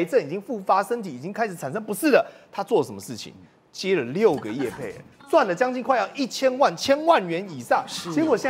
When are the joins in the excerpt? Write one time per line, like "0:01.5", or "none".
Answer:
none